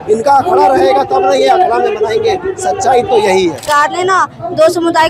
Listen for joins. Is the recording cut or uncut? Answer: cut